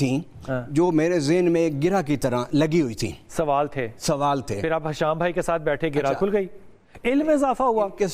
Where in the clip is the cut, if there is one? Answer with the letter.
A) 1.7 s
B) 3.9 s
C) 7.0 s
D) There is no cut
D